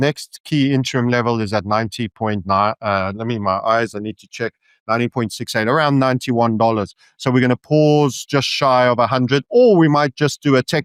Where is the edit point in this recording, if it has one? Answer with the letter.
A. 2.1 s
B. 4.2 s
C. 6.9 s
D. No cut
D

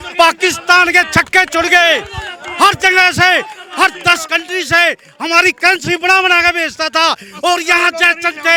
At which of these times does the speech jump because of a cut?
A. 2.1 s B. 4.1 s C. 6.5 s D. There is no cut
D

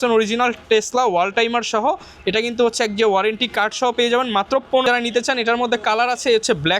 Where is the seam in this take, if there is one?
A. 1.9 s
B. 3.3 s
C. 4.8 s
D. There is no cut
C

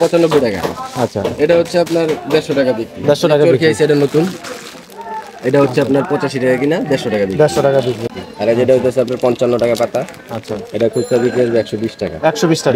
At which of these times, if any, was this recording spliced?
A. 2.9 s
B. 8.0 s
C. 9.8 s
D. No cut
B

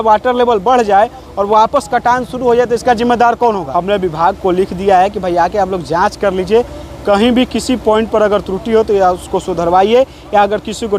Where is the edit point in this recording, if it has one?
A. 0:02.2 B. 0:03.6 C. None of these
B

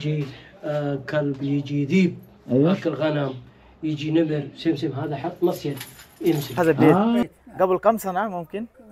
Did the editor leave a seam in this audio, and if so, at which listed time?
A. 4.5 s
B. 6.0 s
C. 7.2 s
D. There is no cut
C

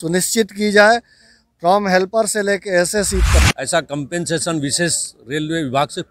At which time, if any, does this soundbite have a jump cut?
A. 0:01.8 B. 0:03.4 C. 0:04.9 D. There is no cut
B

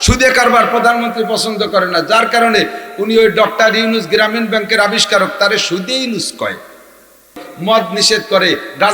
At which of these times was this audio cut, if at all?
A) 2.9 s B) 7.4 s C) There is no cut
B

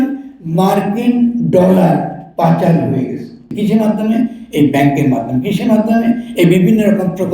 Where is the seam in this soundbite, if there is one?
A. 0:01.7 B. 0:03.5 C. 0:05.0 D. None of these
B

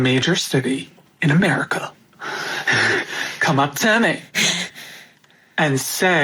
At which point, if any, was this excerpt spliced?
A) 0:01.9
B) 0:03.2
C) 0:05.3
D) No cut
D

